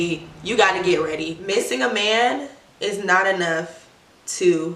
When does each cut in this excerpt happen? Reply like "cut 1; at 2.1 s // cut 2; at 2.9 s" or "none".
cut 1; at 1.3 s